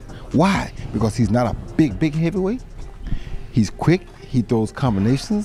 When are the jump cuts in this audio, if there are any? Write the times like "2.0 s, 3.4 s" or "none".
none